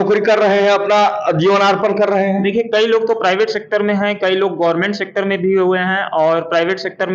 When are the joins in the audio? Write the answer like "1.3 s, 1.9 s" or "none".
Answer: none